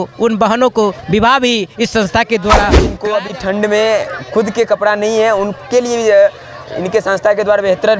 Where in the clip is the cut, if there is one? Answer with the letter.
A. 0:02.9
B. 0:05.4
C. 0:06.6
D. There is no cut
A